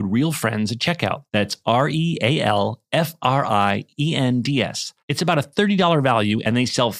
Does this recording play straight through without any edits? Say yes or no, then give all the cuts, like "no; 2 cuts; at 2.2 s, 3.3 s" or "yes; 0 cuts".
yes; 0 cuts